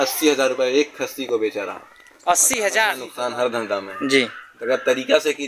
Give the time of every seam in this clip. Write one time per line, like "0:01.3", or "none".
0:03.1

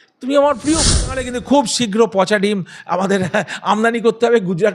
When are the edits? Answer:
0:01.2

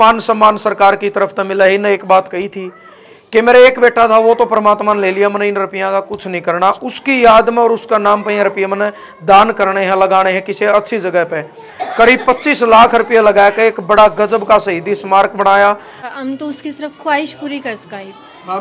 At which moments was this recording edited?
0:16.0

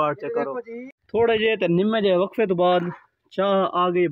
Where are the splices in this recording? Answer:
0:01.0

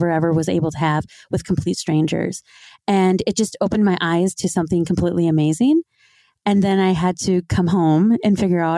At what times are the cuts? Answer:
none

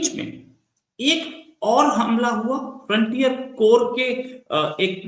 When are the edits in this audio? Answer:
none

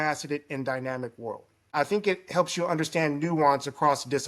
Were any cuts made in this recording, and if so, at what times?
0:01.7

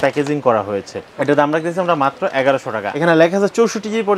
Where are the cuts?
0:02.9

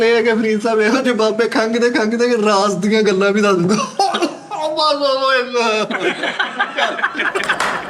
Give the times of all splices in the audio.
none

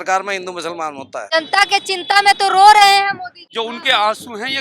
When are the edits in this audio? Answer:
0:01.3
0:03.4

